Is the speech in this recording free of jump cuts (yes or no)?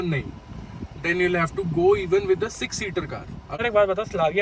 yes